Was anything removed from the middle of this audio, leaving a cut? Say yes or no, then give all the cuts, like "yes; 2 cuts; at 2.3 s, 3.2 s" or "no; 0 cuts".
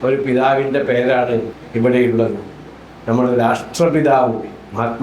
yes; 1 cut; at 1.6 s